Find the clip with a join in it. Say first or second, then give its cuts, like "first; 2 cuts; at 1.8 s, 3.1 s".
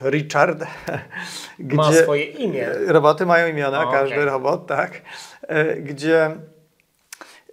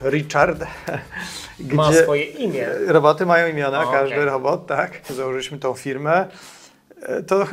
second; 1 cut; at 5.1 s